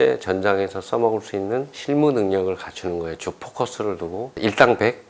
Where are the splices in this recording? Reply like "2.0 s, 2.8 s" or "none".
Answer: 1.7 s, 4.3 s